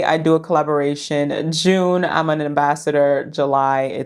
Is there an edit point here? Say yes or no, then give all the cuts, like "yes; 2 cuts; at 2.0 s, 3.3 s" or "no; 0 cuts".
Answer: no; 0 cuts